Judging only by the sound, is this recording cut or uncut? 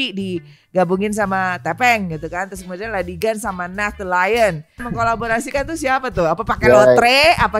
cut